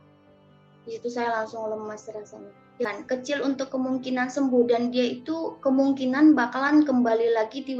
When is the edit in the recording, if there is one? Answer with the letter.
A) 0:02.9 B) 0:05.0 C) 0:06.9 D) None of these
A